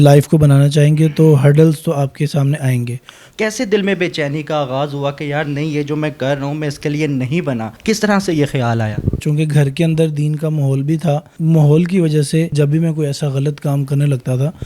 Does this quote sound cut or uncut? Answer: cut